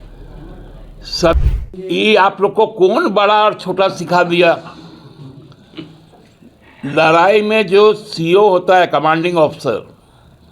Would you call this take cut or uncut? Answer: cut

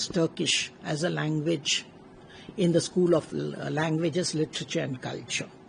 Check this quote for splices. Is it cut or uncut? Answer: uncut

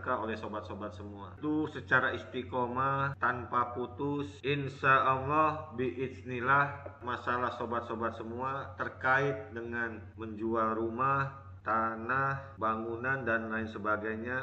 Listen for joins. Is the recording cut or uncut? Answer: cut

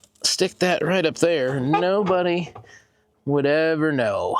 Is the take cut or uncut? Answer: uncut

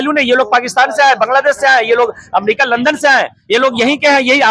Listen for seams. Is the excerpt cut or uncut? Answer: uncut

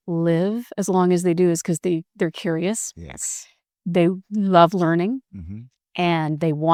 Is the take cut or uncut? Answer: uncut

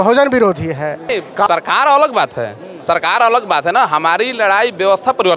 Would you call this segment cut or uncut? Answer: cut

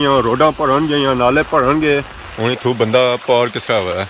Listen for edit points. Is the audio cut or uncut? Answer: cut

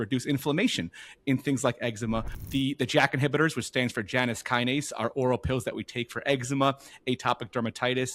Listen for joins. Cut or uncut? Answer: cut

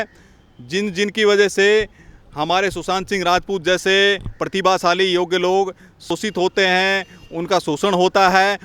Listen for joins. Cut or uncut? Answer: cut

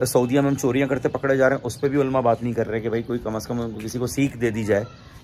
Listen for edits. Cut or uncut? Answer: uncut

